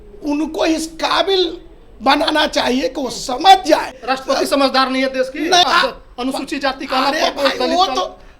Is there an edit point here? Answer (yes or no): yes